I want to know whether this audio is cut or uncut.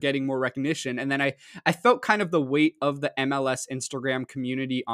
uncut